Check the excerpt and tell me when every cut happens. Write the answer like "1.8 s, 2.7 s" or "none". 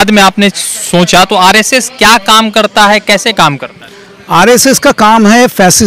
none